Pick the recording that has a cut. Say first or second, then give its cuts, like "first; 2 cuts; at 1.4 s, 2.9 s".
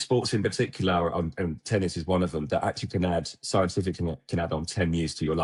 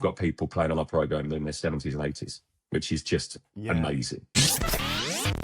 second; 1 cut; at 4.2 s